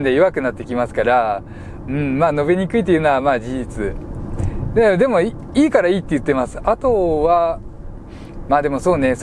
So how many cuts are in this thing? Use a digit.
0